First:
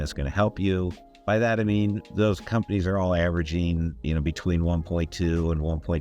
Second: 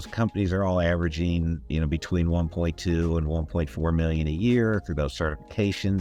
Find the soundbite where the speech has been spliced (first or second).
first